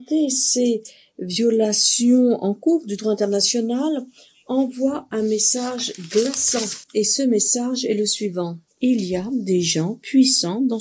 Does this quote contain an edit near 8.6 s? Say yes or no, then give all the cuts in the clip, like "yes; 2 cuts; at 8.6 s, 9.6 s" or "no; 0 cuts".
no; 1 cut; at 6.8 s